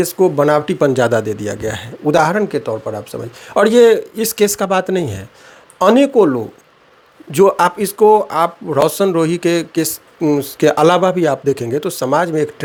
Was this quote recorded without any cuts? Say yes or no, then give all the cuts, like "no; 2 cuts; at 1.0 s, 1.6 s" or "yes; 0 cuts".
yes; 0 cuts